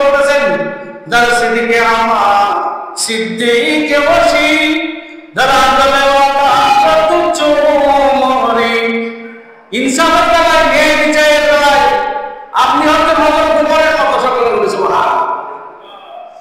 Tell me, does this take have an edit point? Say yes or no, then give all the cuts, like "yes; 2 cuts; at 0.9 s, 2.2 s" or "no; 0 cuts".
no; 0 cuts